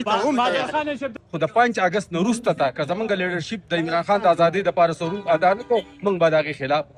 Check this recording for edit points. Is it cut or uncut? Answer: cut